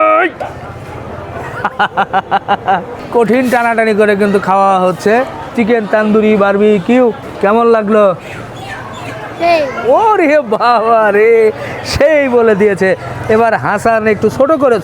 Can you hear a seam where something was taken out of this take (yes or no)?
yes